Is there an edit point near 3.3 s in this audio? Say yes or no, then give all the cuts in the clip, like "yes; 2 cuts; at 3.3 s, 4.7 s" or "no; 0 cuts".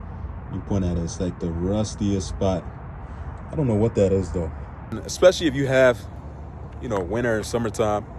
no; 1 cut; at 5.1 s